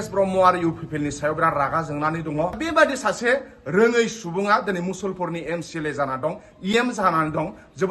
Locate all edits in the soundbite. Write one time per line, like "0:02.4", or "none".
0:02.6